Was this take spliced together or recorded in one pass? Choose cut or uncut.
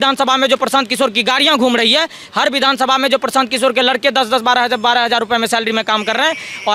uncut